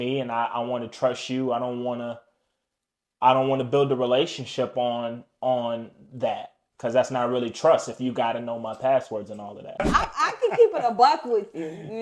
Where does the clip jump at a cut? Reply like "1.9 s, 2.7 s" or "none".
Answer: 9.8 s